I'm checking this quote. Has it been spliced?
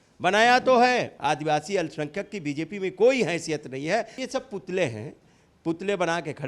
yes; 2 cuts; at 1.1 s, 4.2 s

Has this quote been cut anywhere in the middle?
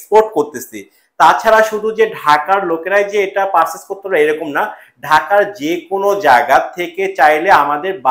no; 0 cuts

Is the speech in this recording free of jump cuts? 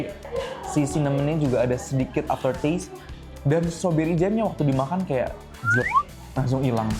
yes; 0 cuts

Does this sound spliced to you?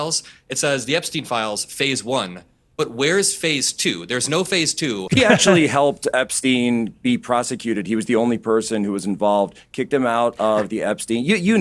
yes; 1 cut; at 5.0 s

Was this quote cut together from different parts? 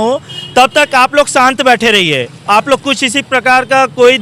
no; 0 cuts

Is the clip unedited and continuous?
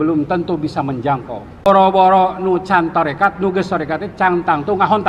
no; 1 cut; at 1.7 s

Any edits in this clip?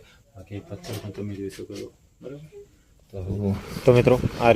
yes; 1 cut; at 3.3 s

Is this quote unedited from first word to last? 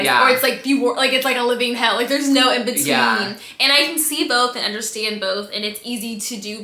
yes; 0 cuts

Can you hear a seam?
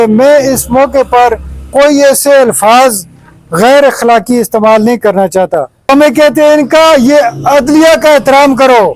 yes; 1 cut; at 5.8 s

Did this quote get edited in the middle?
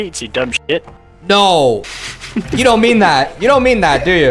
no; 0 cuts

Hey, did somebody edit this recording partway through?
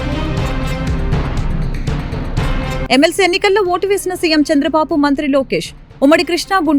no; 0 cuts

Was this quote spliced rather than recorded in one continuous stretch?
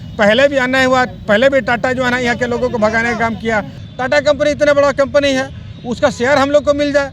yes; 1 cut; at 3.8 s

